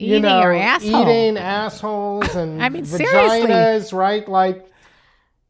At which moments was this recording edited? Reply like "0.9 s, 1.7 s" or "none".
none